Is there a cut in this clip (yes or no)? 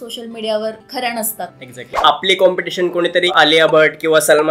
yes